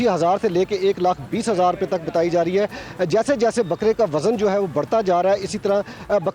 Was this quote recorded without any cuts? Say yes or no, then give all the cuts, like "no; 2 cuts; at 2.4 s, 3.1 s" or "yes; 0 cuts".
yes; 0 cuts